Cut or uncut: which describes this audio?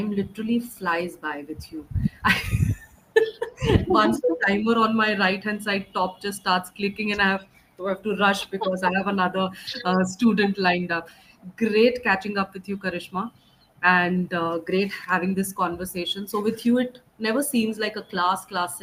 uncut